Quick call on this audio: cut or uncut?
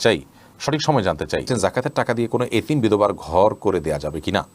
cut